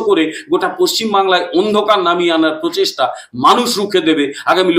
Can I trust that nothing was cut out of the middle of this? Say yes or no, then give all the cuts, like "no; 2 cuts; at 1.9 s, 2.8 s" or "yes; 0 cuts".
yes; 0 cuts